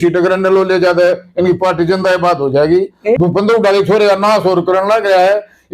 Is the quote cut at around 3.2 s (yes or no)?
yes